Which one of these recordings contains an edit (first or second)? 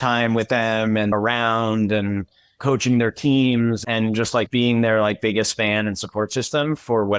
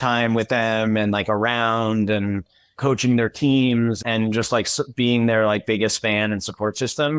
first